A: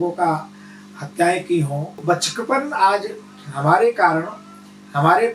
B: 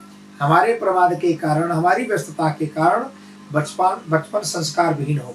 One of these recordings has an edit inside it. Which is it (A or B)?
A